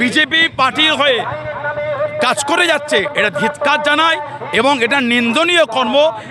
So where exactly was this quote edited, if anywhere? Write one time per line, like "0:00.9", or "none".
none